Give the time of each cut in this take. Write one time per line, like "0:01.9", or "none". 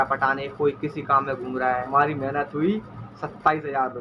0:01.9

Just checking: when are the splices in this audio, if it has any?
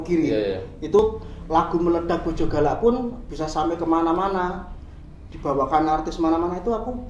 0:01.0

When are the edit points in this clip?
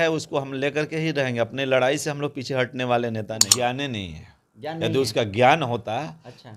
0:03.4

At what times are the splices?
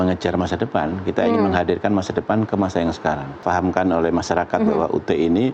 0:03.4

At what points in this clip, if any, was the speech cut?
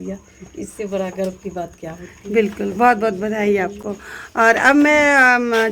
none

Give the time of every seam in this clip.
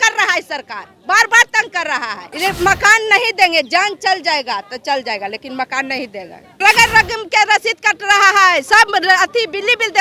0:02.2
0:06.6

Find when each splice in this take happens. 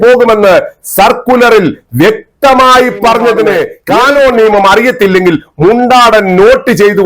0:03.8

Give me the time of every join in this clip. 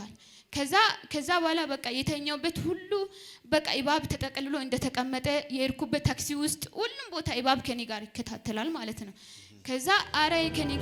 none

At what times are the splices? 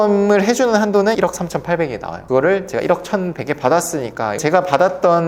0:01.1
0:04.4

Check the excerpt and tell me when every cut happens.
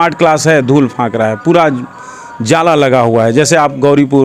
none

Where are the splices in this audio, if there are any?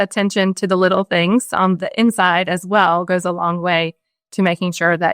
0:01.8

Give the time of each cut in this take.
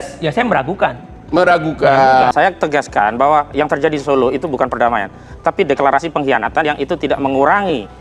0:02.3

